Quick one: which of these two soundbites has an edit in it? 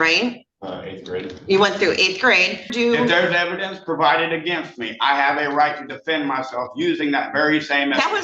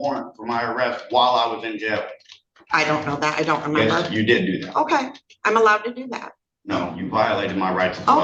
first; 1 cut; at 2.7 s

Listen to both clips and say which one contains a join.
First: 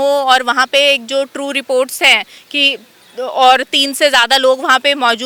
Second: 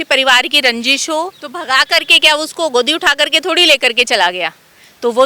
second; 1 cut; at 1.4 s

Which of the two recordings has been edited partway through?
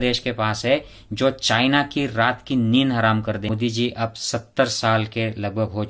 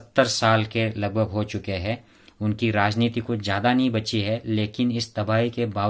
first; 1 cut; at 3.5 s

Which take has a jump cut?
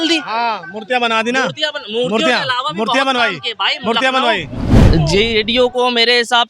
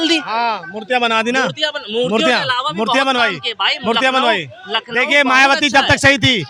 first; 1 cut; at 4.6 s

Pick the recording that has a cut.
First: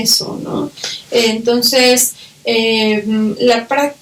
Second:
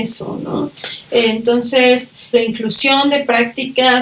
second; 1 cut; at 2.3 s

